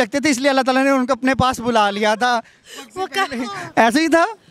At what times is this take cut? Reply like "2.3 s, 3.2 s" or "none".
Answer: none

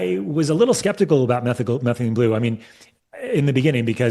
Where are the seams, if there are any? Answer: none

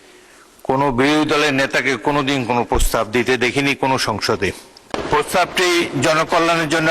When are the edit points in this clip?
5.0 s

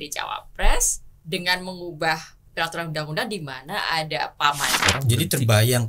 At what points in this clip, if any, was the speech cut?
4.8 s

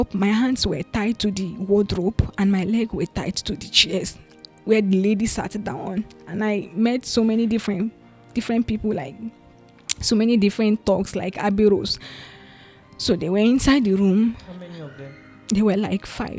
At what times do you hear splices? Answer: none

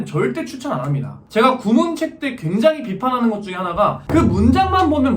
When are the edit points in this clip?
1.1 s

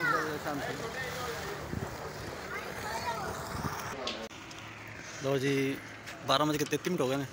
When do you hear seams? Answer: 4.4 s

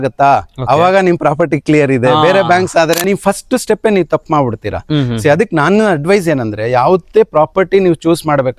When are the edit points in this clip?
3.0 s

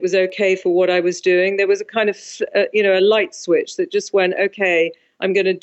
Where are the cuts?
none

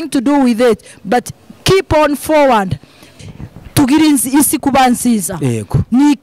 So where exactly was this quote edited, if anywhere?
3.1 s

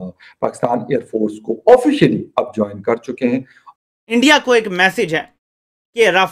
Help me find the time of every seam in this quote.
3.5 s

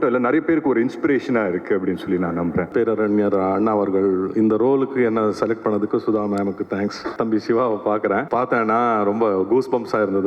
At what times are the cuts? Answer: 2.7 s, 7.1 s, 8.3 s

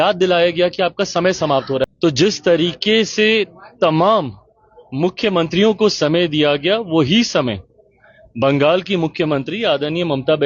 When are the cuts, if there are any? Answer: 1.8 s

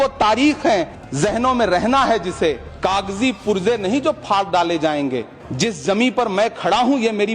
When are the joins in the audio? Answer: 1.0 s, 2.7 s, 5.4 s

